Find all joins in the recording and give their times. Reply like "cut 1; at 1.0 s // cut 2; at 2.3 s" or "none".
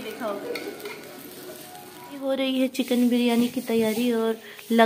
cut 1; at 2.2 s

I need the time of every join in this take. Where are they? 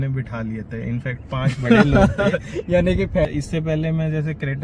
cut 1; at 3.3 s

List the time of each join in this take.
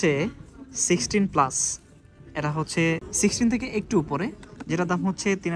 none

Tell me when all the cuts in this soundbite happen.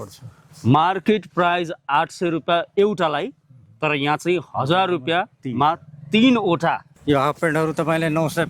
cut 1; at 6.9 s

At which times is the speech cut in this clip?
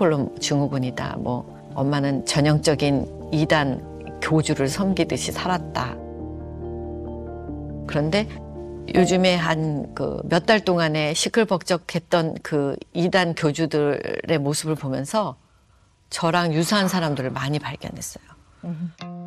none

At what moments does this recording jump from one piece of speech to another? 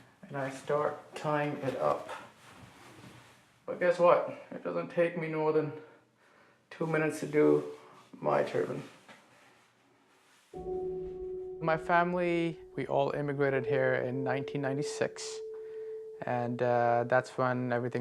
cut 1; at 16.8 s

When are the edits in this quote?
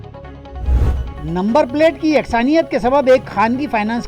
cut 1; at 1.1 s

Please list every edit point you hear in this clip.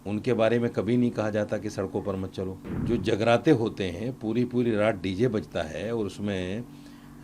cut 1; at 2.7 s

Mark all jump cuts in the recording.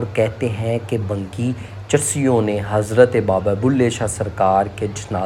none

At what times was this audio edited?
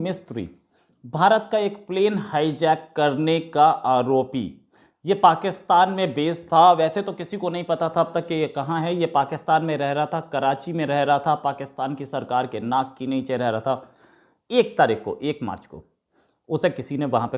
none

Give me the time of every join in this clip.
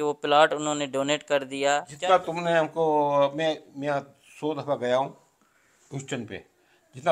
cut 1; at 1.9 s

